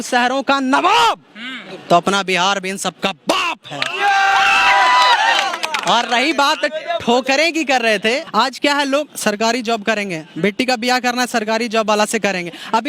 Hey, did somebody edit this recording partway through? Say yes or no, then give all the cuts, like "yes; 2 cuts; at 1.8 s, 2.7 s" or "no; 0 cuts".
no; 0 cuts